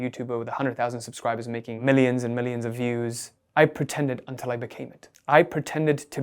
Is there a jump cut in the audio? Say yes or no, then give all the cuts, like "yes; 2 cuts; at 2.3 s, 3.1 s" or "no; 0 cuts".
yes; 1 cut; at 1.8 s